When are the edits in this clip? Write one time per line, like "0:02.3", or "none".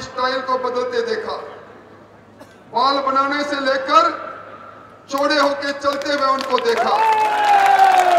none